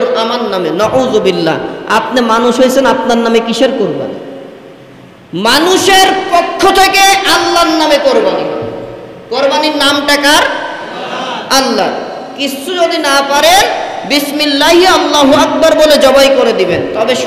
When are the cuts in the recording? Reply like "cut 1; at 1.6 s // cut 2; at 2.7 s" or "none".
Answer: none

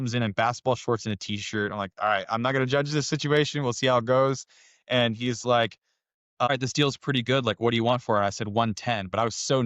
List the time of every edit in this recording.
cut 1; at 6.5 s

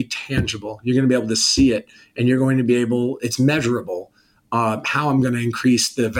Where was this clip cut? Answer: none

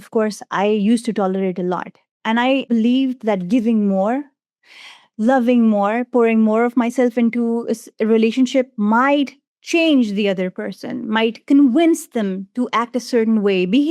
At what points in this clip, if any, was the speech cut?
cut 1; at 2.7 s

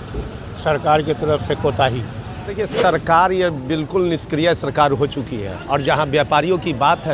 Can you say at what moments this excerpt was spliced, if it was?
cut 1; at 2.7 s

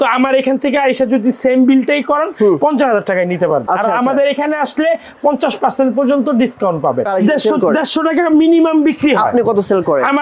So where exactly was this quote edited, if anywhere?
cut 1; at 3.7 s // cut 2; at 7.1 s

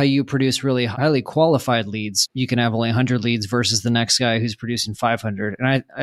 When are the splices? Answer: cut 1; at 0.9 s // cut 2; at 2.2 s

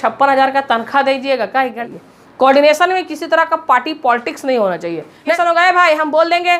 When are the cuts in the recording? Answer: cut 1; at 1.8 s // cut 2; at 5.3 s

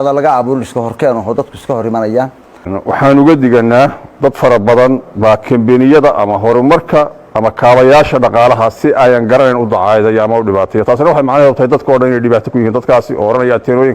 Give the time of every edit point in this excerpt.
cut 1; at 2.7 s

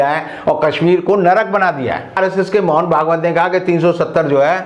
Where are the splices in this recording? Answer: cut 1; at 2.2 s

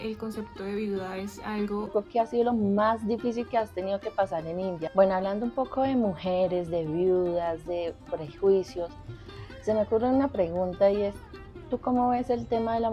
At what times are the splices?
cut 1; at 1.9 s // cut 2; at 4.9 s

